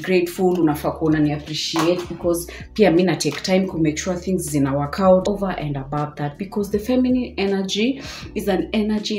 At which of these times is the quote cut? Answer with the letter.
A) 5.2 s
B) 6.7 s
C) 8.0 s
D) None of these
A